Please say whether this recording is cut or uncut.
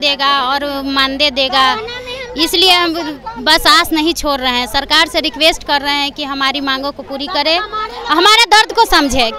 uncut